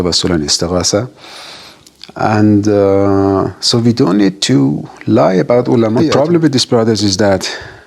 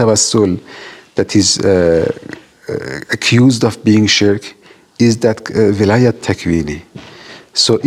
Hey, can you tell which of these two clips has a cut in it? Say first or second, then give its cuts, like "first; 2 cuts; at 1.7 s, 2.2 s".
first; 1 cut; at 5.9 s